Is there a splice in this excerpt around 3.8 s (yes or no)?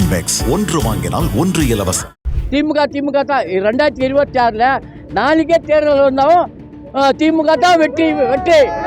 no